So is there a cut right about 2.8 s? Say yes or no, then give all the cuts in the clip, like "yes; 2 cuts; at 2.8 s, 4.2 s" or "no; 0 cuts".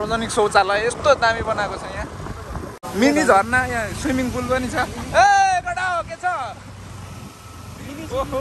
yes; 1 cut; at 2.8 s